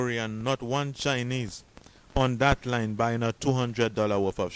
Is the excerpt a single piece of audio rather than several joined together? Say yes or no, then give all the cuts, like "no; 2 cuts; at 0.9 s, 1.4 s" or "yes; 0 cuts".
yes; 0 cuts